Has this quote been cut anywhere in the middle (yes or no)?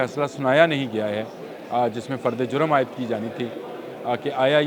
no